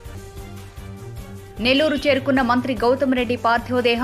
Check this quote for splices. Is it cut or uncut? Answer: cut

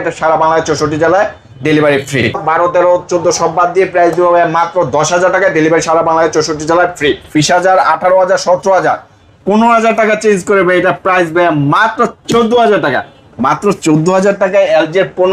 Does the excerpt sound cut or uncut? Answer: cut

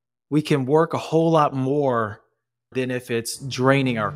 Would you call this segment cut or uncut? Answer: cut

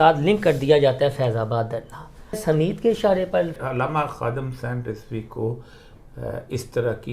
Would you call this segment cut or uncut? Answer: cut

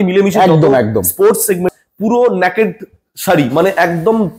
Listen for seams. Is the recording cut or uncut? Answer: cut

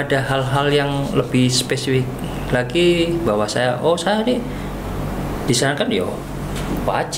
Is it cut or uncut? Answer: uncut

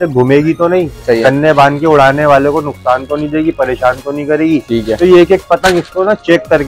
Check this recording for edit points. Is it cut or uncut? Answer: uncut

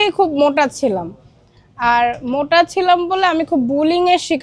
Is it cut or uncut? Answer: uncut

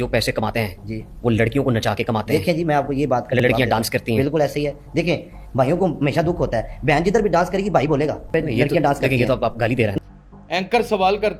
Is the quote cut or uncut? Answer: cut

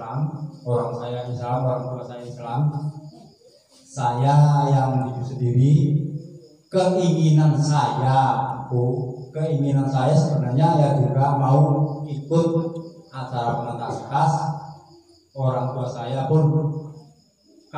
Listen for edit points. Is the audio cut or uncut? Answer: uncut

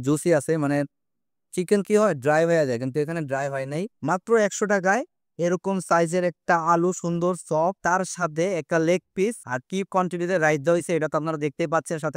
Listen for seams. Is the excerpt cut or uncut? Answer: cut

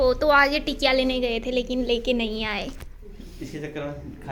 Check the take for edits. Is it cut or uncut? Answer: uncut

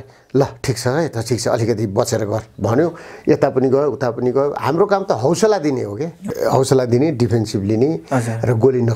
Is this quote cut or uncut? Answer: uncut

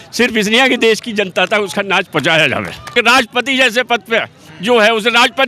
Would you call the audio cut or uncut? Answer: cut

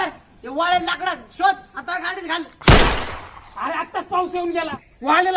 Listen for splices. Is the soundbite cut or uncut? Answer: uncut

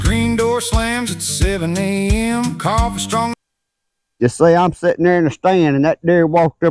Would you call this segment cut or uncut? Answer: cut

